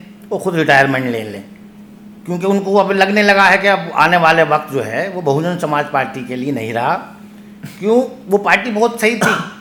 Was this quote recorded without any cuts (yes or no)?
yes